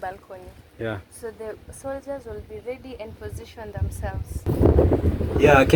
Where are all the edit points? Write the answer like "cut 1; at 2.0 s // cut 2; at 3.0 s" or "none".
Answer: cut 1; at 4.5 s

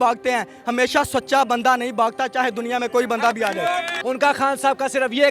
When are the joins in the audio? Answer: cut 1; at 3.9 s

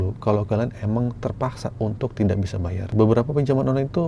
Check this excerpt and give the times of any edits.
cut 1; at 2.9 s

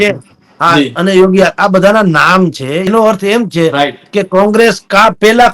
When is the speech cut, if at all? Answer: cut 1; at 2.9 s

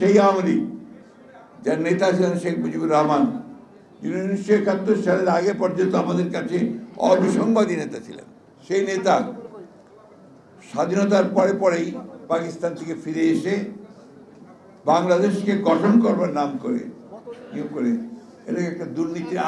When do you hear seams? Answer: none

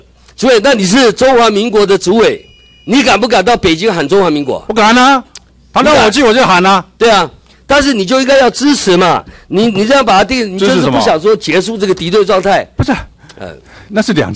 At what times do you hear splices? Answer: none

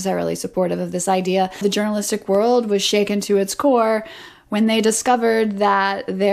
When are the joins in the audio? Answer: cut 1; at 1.6 s

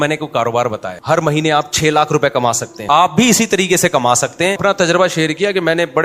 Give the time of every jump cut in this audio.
cut 1; at 0.9 s // cut 2; at 2.7 s // cut 3; at 4.6 s

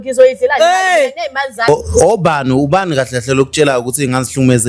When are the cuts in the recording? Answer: cut 1; at 1.7 s

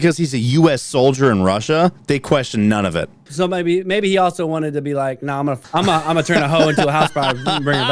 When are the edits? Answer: cut 1; at 3.2 s // cut 2; at 5.6 s

